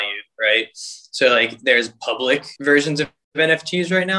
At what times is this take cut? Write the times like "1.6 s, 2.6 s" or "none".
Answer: 2.5 s